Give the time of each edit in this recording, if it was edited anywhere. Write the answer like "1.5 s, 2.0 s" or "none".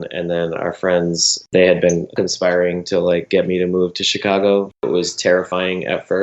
1.4 s, 2.1 s, 4.8 s